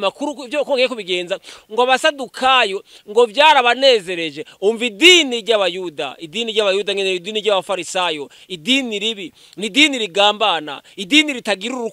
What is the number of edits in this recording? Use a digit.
0